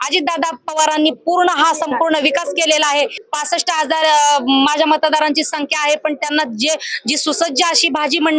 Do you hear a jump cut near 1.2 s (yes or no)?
no